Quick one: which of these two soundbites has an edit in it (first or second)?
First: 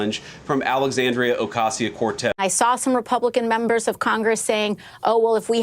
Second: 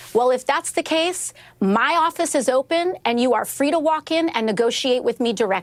first